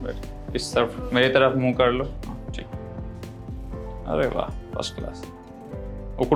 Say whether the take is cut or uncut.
uncut